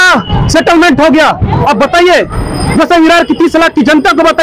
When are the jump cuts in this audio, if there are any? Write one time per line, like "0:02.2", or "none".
none